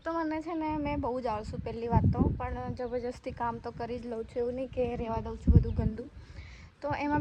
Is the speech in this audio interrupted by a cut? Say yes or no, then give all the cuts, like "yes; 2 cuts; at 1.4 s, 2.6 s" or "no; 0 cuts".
no; 0 cuts